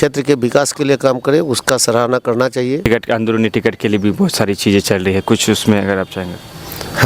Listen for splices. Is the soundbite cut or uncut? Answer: cut